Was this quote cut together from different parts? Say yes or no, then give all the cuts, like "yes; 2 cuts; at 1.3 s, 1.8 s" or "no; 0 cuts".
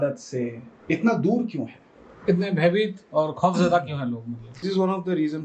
yes; 1 cut; at 4.5 s